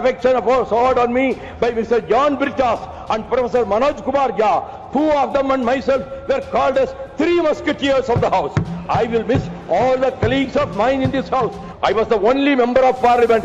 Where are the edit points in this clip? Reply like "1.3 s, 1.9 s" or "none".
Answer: 11.6 s

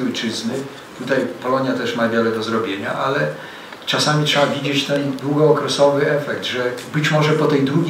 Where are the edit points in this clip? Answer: none

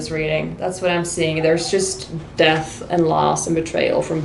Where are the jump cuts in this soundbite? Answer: none

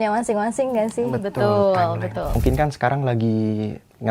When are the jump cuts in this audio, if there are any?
2.3 s

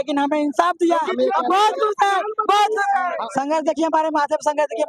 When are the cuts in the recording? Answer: 3.2 s

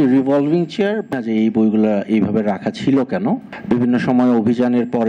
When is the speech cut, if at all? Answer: 1.1 s, 3.5 s

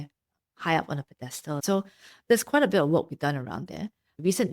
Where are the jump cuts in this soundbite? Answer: 1.6 s

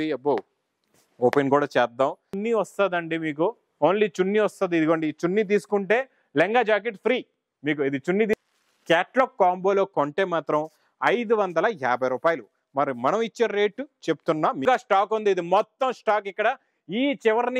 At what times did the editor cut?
2.3 s, 8.3 s, 14.6 s

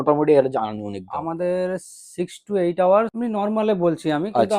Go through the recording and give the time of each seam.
3.1 s

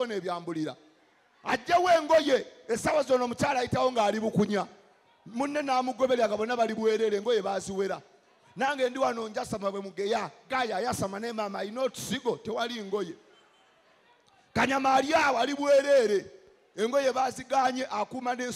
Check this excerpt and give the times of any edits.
none

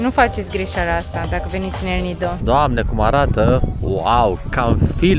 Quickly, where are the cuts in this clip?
2.4 s

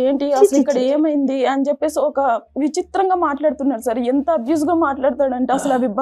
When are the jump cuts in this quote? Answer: none

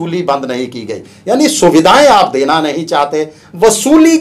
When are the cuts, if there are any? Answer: none

